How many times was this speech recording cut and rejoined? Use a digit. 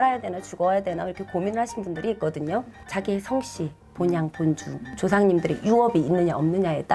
1